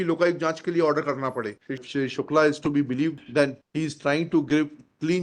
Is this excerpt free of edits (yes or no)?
no